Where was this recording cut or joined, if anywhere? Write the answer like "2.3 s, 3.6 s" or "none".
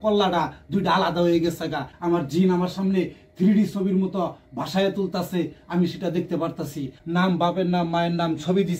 1.9 s, 7.0 s